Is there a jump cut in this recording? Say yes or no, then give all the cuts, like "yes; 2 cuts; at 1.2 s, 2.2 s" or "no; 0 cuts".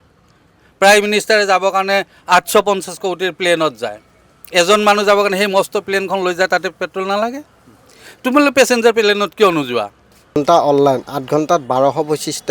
yes; 1 cut; at 10.4 s